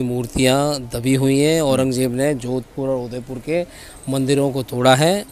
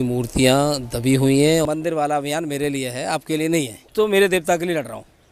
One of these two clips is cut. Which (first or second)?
second